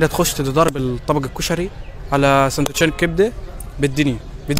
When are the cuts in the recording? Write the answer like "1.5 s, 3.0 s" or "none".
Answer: none